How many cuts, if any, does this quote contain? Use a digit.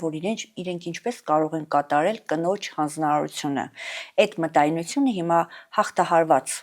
0